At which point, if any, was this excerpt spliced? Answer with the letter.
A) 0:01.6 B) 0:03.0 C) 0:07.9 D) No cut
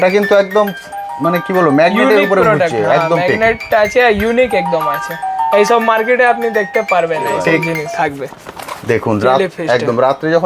C